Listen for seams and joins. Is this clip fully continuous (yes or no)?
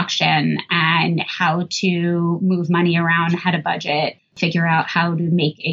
no